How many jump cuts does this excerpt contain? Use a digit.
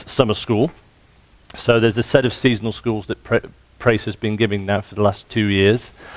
1